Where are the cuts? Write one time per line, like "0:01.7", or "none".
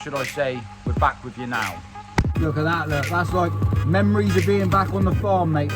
0:02.3